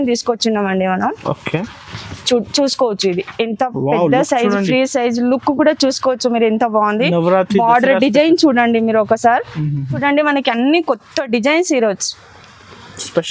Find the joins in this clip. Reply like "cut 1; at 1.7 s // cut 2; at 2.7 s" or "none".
cut 1; at 10.0 s